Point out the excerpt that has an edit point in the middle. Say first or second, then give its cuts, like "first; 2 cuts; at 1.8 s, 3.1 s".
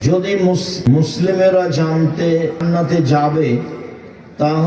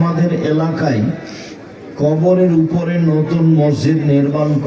first; 2 cuts; at 1.1 s, 2.6 s